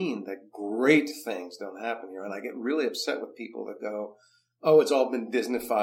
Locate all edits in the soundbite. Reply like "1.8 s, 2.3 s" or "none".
none